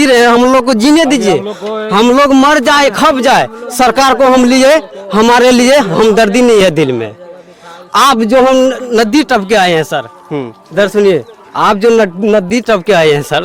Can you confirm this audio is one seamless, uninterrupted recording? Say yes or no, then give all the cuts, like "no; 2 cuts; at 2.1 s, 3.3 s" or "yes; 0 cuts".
yes; 0 cuts